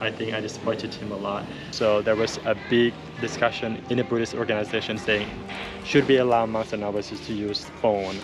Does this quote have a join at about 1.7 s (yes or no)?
yes